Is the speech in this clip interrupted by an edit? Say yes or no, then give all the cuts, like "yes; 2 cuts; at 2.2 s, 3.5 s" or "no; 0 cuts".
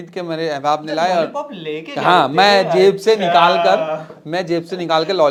no; 0 cuts